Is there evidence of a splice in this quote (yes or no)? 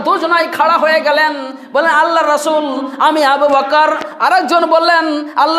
no